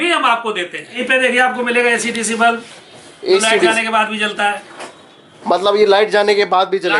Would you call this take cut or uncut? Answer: cut